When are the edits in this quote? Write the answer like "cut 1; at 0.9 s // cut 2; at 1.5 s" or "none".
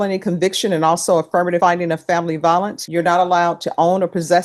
cut 1; at 1.6 s // cut 2; at 2.8 s